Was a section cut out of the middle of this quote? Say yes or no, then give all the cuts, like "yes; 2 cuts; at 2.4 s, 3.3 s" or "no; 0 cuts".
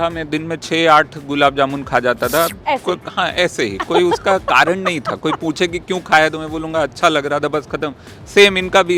no; 0 cuts